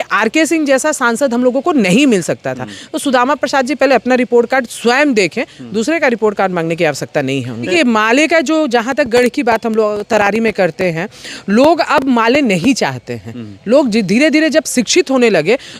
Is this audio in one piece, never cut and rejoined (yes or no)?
no